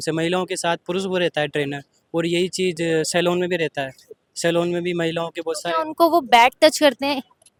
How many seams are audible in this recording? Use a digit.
0